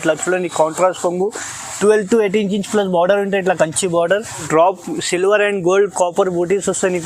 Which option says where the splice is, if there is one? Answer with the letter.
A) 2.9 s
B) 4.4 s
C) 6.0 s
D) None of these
B